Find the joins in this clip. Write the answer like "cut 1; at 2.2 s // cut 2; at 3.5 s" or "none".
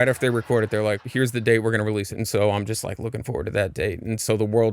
cut 1; at 1.0 s // cut 2; at 2.2 s